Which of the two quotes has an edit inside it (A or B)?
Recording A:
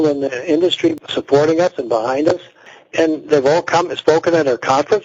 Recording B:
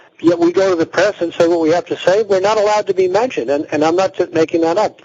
A